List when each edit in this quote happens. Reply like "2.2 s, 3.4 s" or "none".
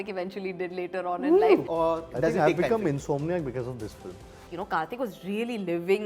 1.7 s, 4.5 s